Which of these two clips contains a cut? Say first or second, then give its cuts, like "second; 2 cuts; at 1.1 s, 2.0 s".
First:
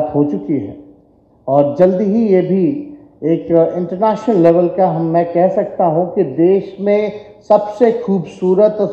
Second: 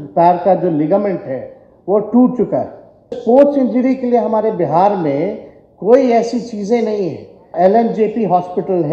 second; 2 cuts; at 3.2 s, 7.5 s